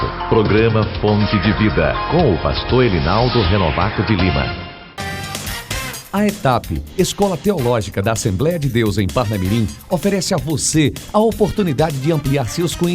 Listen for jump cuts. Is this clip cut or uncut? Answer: uncut